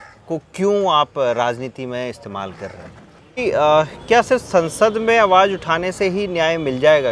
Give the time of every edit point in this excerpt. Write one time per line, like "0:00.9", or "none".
0:03.4